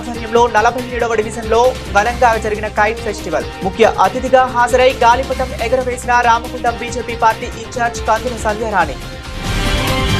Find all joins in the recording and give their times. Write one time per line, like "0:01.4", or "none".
none